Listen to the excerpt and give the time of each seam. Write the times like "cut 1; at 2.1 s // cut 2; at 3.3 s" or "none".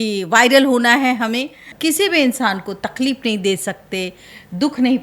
cut 1; at 1.6 s